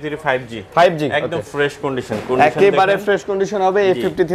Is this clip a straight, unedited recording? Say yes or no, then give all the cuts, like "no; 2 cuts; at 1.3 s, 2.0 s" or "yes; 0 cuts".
yes; 0 cuts